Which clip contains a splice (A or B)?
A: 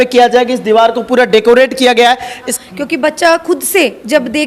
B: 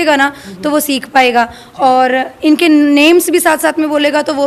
A